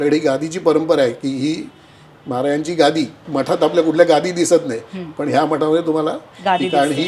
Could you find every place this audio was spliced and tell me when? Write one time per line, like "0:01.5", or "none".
0:03.2